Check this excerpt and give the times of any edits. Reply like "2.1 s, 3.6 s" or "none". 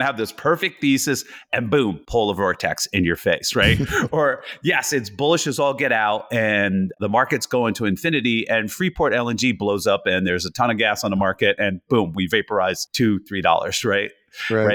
7.0 s, 12.8 s